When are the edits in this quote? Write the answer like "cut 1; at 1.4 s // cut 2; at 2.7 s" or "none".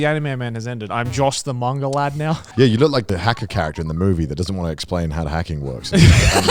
cut 1; at 2.5 s // cut 2; at 3.0 s